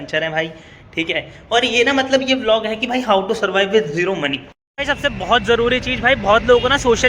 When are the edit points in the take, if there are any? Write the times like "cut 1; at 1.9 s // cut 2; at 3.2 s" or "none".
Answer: cut 1; at 4.5 s